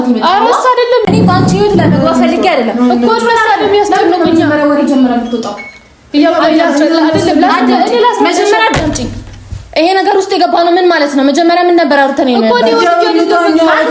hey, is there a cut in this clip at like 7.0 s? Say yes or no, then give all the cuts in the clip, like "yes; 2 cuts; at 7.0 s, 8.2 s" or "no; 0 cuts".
no; 1 cut; at 1.0 s